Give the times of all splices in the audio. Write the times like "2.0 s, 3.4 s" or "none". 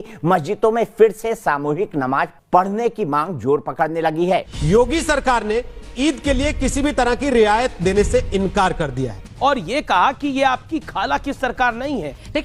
none

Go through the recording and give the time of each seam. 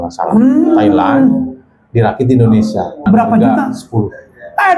3.0 s

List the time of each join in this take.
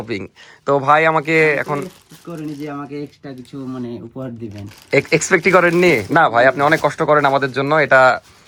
none

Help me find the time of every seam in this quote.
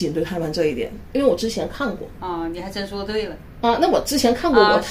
none

